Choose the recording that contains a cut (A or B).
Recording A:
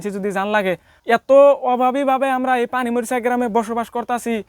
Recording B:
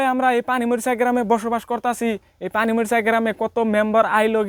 A